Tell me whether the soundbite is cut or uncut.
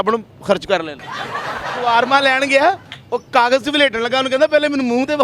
cut